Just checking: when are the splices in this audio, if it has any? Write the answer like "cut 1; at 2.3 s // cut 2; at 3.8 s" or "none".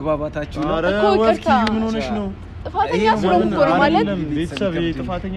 none